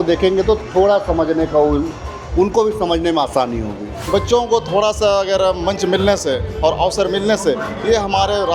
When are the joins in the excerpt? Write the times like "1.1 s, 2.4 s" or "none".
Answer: 4.0 s